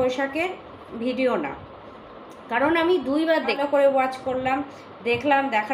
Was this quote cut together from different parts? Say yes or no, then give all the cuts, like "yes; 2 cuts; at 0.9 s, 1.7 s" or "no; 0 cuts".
yes; 1 cut; at 3.6 s